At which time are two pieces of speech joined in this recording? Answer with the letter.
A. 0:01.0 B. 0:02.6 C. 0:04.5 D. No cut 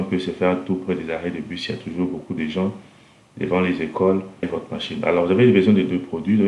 C